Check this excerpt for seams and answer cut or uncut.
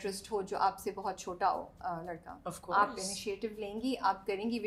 uncut